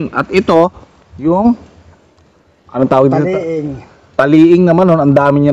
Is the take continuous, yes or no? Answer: yes